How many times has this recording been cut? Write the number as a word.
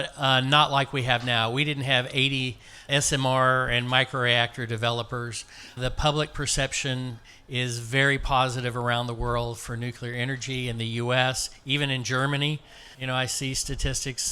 three